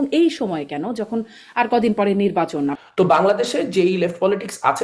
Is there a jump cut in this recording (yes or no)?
yes